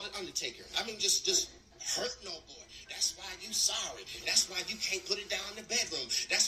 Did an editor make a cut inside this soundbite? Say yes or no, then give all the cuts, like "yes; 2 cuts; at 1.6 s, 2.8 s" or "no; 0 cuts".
no; 0 cuts